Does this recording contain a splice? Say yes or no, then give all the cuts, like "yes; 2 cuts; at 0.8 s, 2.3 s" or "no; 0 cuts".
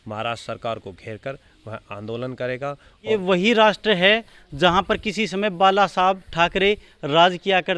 yes; 1 cut; at 3.1 s